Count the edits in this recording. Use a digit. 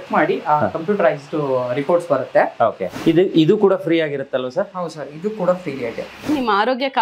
2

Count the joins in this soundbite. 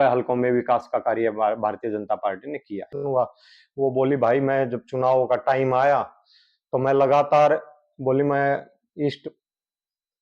1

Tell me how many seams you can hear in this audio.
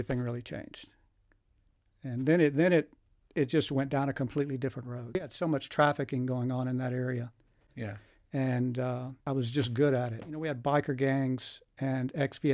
3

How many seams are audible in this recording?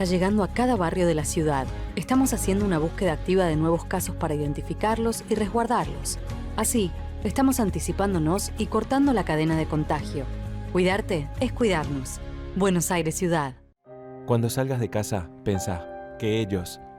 1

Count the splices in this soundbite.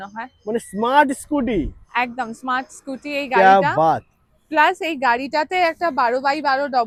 0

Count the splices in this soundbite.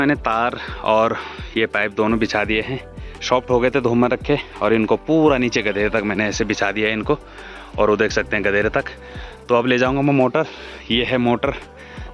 0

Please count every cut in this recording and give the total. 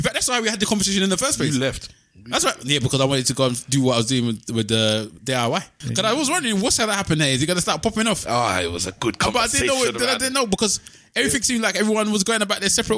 1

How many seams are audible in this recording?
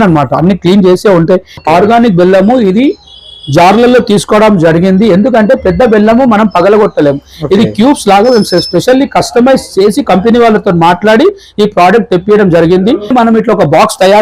2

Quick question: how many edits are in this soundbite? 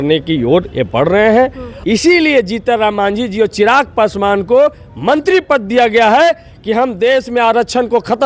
1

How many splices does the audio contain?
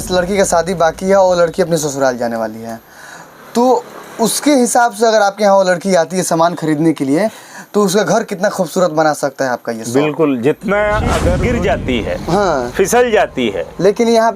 1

